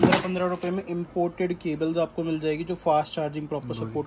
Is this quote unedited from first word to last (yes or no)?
yes